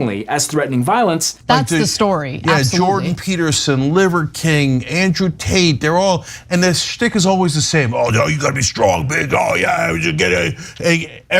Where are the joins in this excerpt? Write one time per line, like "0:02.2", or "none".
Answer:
0:01.4

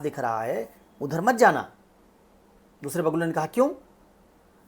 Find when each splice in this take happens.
none

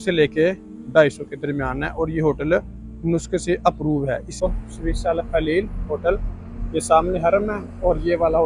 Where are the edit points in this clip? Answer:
0:04.3

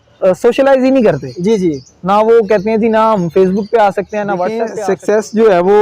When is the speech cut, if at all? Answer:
0:04.6

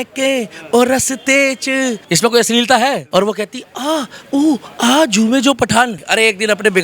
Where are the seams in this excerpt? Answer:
0:03.0
0:06.0

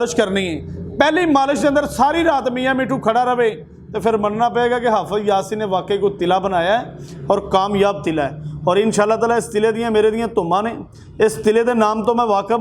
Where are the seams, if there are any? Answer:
none

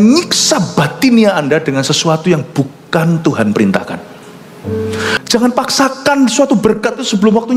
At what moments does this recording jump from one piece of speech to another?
0:05.1

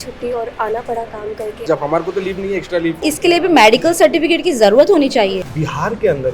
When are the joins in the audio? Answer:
0:01.7
0:03.0
0:05.5

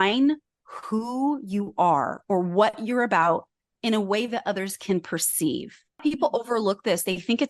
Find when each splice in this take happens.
0:06.0

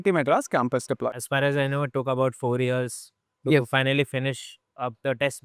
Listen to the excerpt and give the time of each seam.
0:01.1

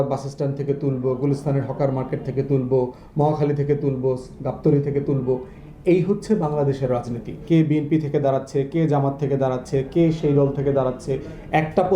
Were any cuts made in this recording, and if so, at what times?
0:07.4

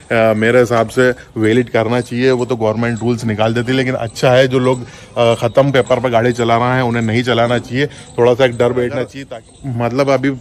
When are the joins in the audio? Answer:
0:09.1

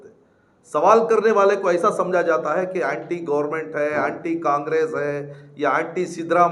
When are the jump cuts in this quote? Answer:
none

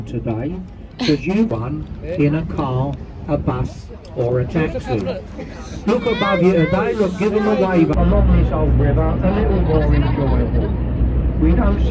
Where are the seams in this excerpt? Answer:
0:01.5
0:07.9

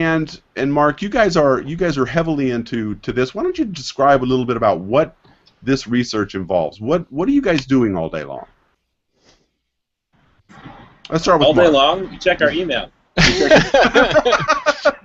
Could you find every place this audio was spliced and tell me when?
none

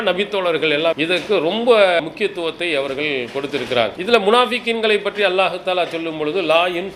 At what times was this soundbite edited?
0:00.9
0:02.0
0:04.0

